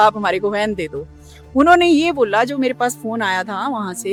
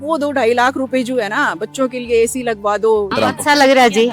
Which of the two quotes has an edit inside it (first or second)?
second